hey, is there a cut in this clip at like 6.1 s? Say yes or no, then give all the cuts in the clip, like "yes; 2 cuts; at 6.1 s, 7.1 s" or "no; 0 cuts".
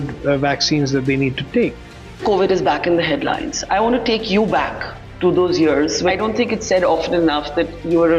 yes; 2 cuts; at 2.1 s, 6.1 s